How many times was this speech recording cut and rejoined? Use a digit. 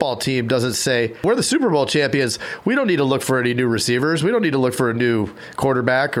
0